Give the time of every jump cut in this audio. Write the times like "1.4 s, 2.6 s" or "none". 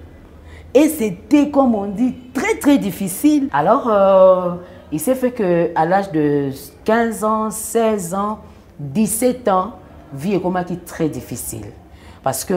3.5 s